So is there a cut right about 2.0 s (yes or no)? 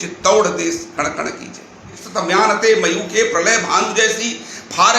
yes